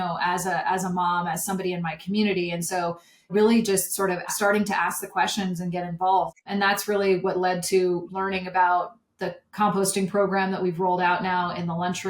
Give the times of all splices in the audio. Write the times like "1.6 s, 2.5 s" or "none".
3.3 s, 4.3 s, 6.3 s, 8.1 s